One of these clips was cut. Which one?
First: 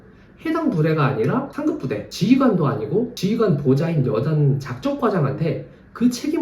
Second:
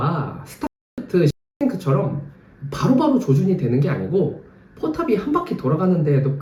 first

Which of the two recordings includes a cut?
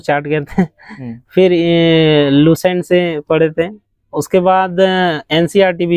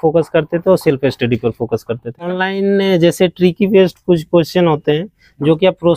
second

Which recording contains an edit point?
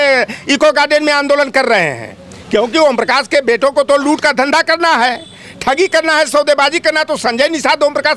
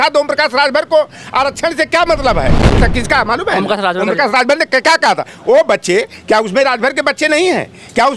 second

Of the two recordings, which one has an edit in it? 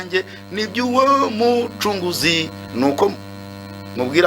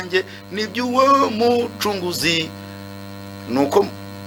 first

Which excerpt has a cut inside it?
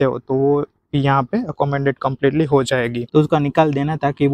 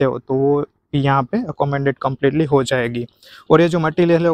first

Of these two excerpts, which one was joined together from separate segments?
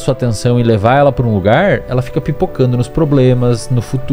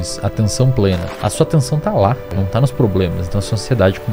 second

